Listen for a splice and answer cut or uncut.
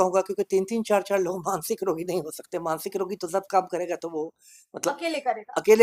uncut